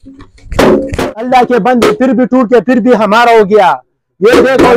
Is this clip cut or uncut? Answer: uncut